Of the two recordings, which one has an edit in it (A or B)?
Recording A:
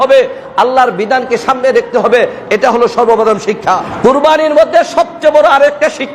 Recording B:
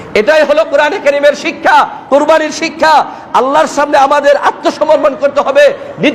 A